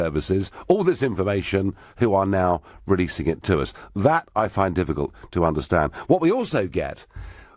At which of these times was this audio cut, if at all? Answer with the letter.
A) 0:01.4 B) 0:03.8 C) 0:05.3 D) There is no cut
A